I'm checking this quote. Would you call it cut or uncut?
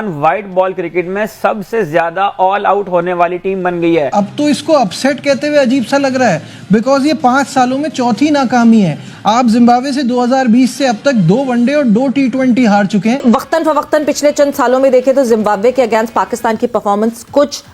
cut